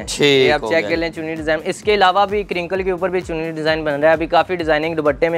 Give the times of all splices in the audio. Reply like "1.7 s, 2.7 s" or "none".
none